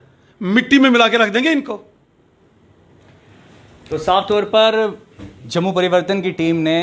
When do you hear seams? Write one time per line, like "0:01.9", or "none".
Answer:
none